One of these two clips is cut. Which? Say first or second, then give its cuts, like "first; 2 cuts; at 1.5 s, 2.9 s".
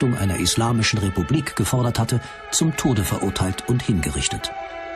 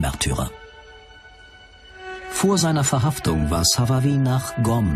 first; 1 cut; at 2.3 s